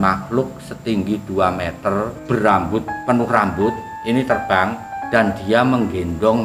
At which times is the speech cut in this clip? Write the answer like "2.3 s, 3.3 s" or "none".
2.2 s, 2.9 s, 3.9 s, 4.9 s

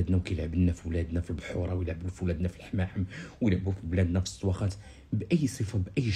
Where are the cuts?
none

